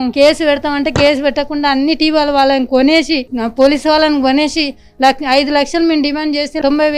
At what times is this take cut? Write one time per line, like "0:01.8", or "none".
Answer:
none